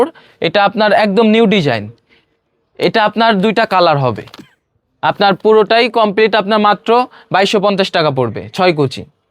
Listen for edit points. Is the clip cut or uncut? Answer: uncut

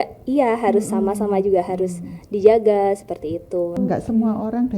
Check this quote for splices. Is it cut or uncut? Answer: cut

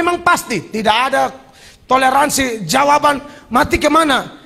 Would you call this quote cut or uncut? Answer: uncut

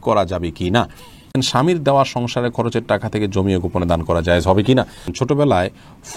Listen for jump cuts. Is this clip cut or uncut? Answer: cut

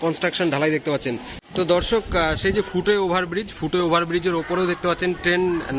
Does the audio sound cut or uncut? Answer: cut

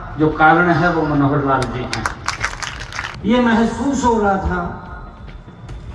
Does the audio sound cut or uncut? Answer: cut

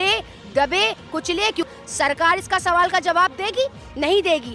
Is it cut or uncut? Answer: cut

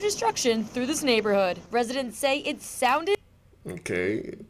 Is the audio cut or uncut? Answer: uncut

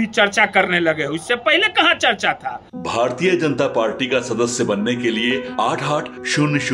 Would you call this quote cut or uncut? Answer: uncut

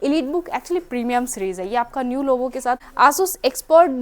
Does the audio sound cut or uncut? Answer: cut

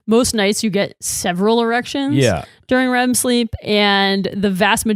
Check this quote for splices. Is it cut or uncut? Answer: uncut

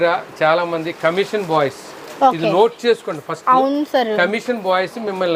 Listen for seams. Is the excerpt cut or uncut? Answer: uncut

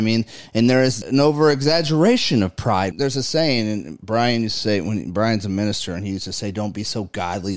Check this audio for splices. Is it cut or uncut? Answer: cut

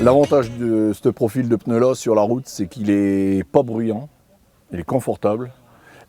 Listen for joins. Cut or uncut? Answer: uncut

